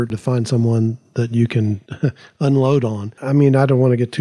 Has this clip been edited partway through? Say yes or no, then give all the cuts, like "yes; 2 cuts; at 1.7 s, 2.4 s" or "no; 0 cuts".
yes; 1 cut; at 3.2 s